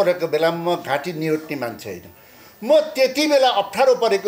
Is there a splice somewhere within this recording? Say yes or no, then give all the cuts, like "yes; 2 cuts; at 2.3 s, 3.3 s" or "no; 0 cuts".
no; 0 cuts